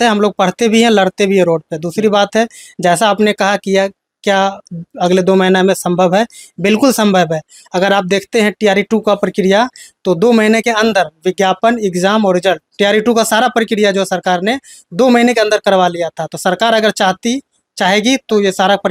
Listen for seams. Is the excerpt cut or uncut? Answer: uncut